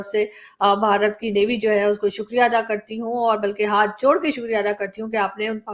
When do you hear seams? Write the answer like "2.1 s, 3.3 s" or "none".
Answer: none